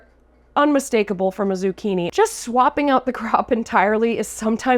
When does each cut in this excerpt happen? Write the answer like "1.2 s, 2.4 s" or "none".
2.1 s